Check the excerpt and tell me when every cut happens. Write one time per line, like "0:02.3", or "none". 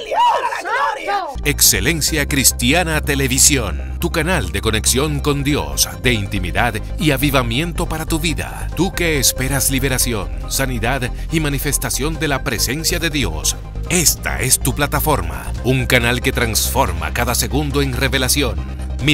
0:01.3